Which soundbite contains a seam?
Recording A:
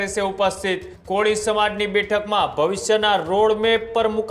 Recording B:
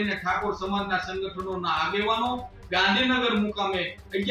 A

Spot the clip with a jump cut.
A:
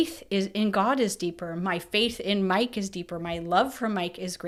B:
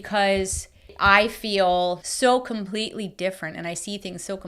B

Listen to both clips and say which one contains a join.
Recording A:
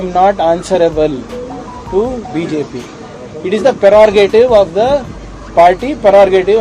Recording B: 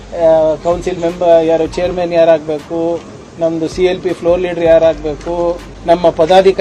B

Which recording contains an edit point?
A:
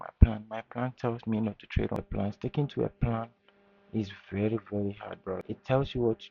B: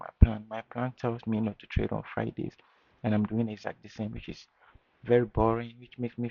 A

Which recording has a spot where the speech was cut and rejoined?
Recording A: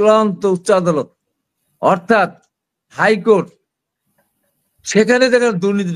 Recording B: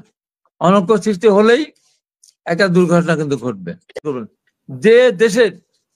B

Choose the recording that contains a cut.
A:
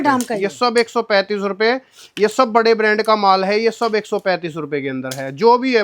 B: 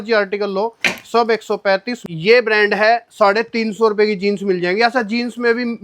B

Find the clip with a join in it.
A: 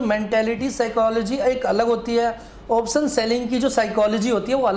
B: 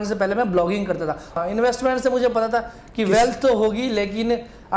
B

